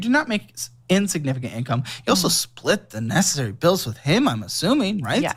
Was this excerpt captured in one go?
yes; 0 cuts

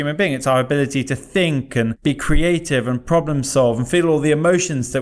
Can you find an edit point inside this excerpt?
no; 0 cuts

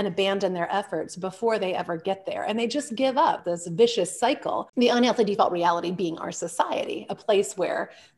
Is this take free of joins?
no; 2 cuts; at 3.5 s, 4.7 s

